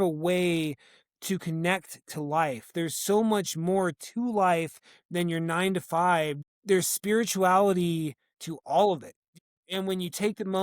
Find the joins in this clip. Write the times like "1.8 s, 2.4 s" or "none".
6.4 s, 9.5 s

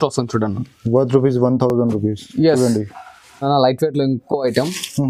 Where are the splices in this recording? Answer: none

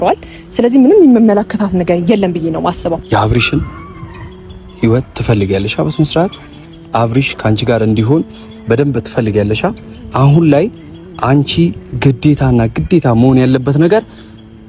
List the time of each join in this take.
3.0 s

